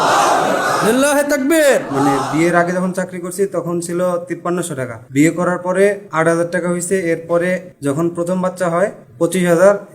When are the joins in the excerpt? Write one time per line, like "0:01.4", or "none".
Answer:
0:01.7
0:04.6
0:06.0
0:07.7
0:09.0